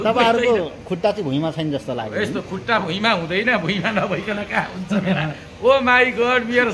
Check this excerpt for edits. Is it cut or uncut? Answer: uncut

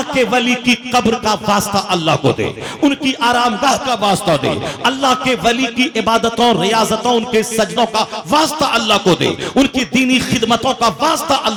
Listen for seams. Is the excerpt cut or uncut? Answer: uncut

